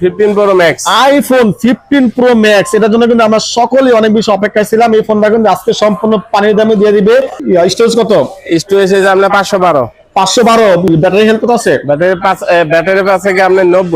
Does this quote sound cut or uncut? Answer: uncut